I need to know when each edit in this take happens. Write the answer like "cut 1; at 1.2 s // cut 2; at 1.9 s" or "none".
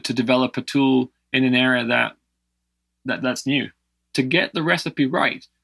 cut 1; at 4.1 s